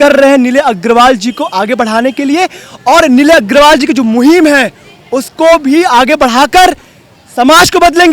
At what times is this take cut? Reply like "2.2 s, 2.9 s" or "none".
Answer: none